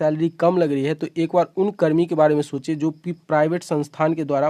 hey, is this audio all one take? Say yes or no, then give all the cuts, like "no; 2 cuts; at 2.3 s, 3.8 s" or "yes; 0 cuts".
yes; 0 cuts